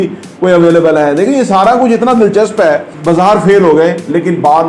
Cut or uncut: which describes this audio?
cut